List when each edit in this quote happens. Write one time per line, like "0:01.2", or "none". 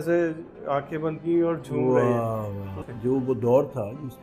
0:02.7

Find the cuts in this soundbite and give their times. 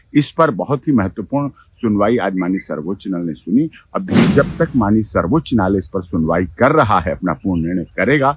0:04.3

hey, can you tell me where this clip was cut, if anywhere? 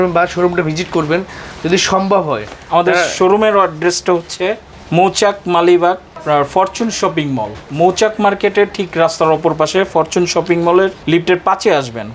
none

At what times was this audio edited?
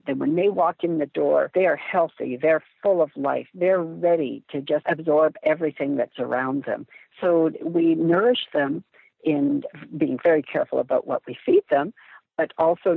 0:01.5
0:04.8

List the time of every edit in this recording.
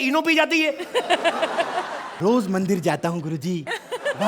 0:02.0

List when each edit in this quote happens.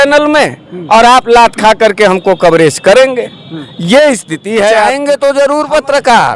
0:05.0

